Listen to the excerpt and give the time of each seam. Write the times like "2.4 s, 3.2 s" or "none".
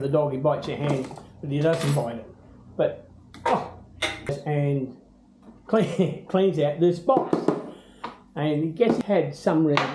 4.3 s, 9.0 s